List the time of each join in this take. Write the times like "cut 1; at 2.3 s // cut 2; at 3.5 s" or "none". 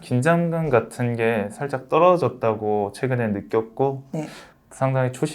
cut 1; at 4.4 s